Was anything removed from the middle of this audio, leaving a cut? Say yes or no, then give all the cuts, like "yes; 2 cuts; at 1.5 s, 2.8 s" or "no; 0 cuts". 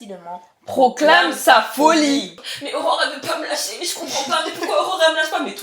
yes; 1 cut; at 2.4 s